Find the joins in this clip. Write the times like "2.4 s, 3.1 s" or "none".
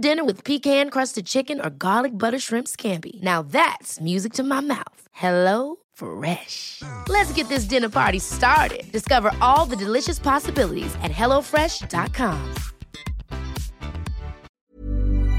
14.5 s